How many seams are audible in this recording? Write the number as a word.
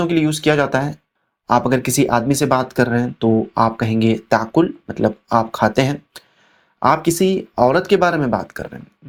zero